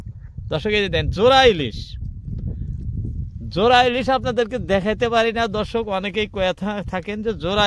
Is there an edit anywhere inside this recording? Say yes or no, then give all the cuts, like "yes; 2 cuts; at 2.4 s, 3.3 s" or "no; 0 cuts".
no; 0 cuts